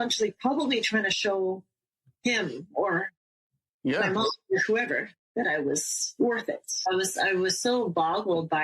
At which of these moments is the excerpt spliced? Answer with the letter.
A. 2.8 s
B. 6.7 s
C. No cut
B